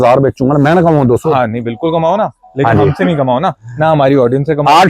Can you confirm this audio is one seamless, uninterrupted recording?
yes; 0 cuts

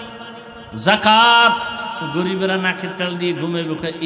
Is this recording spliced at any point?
yes; 1 cut; at 2.0 s

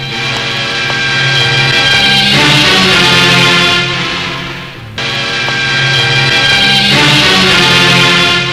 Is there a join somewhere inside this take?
yes; 1 cut; at 5.0 s

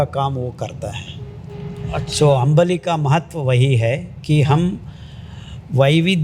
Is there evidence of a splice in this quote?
no; 0 cuts

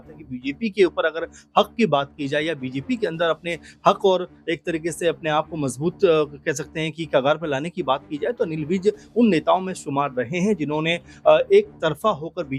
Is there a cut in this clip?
no; 0 cuts

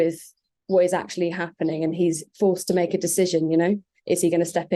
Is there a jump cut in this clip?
no; 0 cuts

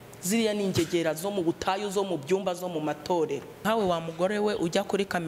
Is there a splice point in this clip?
yes; 1 cut; at 3.6 s

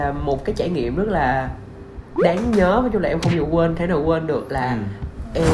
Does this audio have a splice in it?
no; 0 cuts

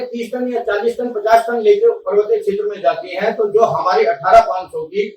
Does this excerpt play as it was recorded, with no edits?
yes; 0 cuts

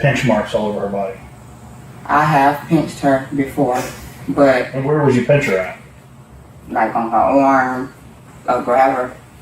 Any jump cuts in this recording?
yes; 2 cuts; at 4.8 s, 8.1 s

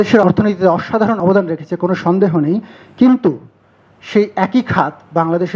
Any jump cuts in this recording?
no; 0 cuts

